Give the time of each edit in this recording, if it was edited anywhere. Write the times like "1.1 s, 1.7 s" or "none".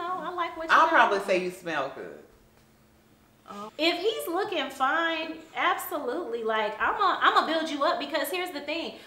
none